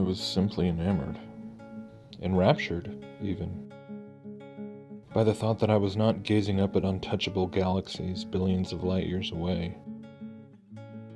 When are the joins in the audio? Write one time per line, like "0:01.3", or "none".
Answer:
0:08.4

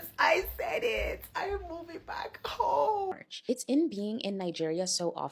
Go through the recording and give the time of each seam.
0:03.3

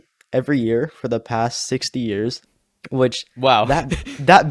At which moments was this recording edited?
0:02.4

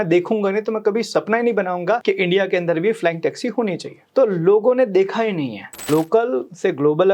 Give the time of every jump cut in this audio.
0:02.0
0:03.9
0:05.9

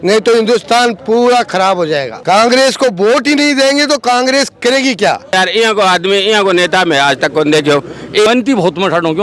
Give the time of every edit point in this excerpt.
0:02.1
0:05.3
0:08.3

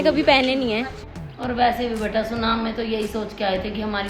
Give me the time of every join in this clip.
0:01.1

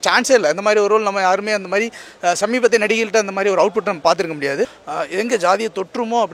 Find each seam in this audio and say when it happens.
0:04.8

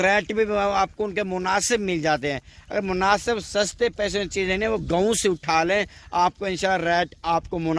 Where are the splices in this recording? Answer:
none

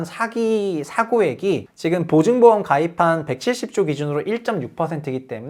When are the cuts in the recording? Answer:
none

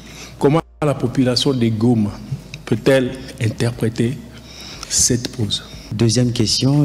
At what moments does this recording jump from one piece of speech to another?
0:05.9

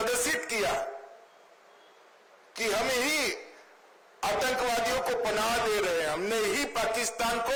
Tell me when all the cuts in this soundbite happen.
none

